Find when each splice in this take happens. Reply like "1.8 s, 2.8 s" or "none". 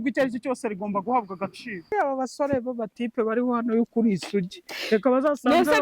1.9 s